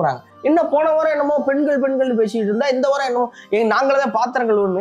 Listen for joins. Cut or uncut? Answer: uncut